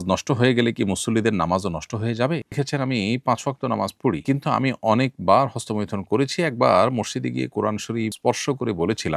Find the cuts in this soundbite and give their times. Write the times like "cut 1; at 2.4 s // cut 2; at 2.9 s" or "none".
cut 1; at 2.5 s